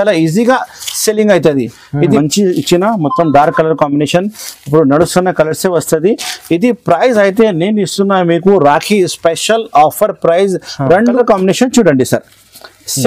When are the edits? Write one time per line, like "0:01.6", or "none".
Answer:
0:02.2
0:11.1